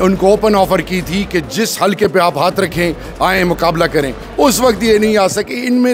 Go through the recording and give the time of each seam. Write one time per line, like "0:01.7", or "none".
none